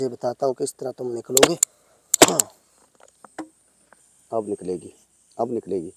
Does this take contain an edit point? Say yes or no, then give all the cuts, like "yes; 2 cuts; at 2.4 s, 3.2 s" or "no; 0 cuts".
yes; 1 cut; at 4.1 s